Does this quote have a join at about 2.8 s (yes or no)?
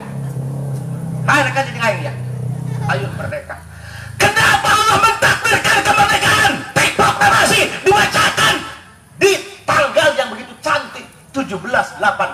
yes